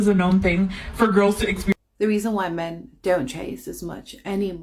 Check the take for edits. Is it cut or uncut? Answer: cut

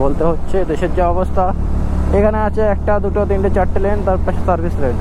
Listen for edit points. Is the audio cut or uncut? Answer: uncut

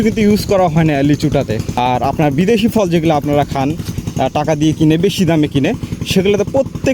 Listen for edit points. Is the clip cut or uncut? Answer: cut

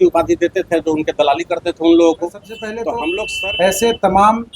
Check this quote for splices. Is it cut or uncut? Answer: cut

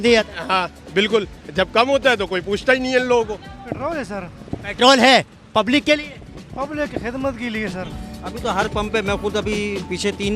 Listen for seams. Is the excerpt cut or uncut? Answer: cut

